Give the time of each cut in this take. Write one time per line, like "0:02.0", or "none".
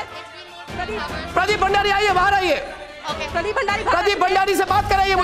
none